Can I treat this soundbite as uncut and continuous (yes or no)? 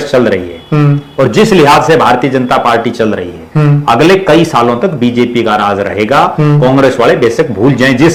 yes